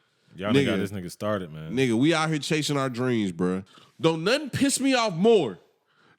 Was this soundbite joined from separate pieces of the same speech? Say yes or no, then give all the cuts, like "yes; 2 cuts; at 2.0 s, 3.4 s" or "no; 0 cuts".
yes; 1 cut; at 3.7 s